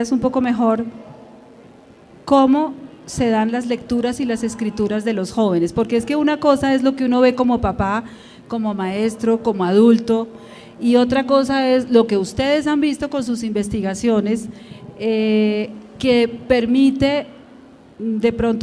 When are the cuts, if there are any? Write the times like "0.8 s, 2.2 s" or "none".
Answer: none